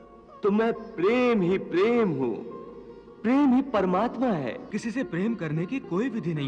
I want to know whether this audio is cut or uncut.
cut